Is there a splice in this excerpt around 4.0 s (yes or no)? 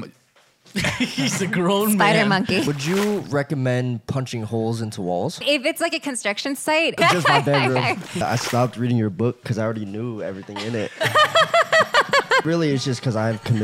no